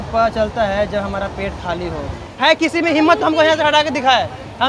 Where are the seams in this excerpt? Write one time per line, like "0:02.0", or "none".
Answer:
0:02.3